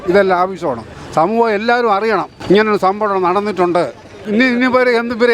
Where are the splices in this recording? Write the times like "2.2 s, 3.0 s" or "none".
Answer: 2.3 s, 4.4 s